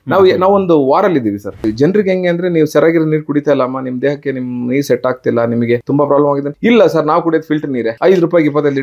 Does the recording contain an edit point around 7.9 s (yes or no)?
yes